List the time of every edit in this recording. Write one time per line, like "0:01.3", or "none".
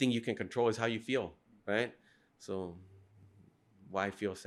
none